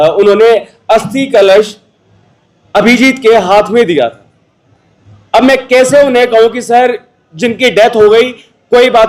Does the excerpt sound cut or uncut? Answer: uncut